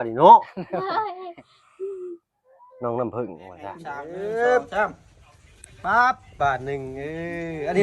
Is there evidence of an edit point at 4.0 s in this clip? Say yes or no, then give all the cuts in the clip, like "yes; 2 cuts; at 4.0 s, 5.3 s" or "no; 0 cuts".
yes; 1 cut; at 4.0 s